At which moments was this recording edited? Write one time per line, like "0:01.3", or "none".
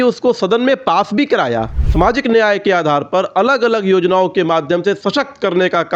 0:01.8